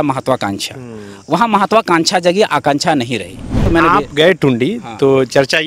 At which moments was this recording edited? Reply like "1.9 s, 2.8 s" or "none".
3.6 s